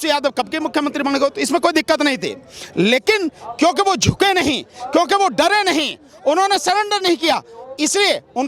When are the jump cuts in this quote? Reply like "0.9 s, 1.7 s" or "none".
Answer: none